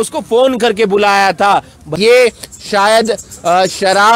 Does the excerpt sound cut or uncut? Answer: cut